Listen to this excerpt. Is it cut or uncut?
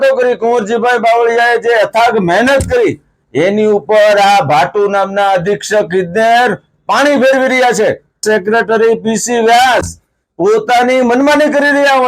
cut